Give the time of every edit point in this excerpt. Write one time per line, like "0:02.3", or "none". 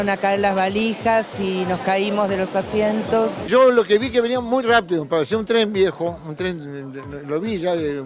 0:03.5